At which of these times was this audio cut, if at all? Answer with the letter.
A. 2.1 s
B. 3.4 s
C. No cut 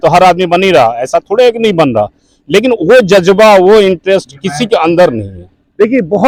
C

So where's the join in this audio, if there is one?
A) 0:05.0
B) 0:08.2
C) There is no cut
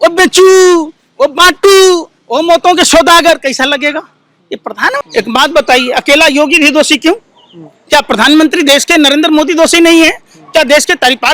A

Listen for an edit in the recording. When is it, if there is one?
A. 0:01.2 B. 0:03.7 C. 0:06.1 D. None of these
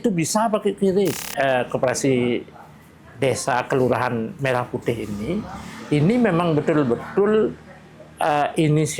A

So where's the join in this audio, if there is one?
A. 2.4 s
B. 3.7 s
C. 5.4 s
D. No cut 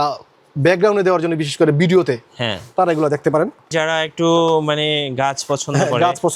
B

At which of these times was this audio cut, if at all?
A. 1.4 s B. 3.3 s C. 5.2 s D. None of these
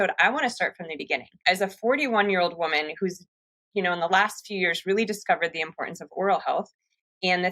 A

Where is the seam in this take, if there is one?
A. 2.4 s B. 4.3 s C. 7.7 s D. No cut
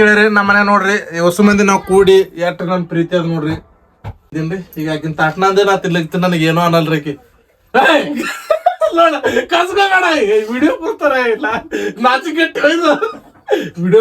B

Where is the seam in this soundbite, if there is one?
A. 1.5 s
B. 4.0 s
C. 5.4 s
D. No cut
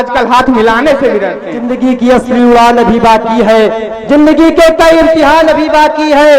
A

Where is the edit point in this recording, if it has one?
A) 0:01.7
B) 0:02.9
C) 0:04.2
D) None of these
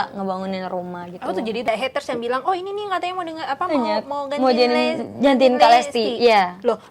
A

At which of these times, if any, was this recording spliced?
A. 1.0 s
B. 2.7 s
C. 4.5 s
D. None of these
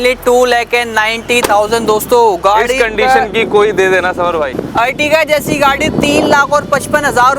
C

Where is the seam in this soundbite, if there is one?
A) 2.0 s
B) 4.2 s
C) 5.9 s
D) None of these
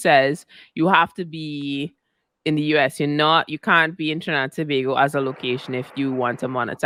D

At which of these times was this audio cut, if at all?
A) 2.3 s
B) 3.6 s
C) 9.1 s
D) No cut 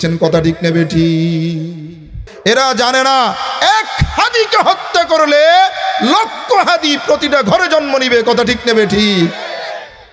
A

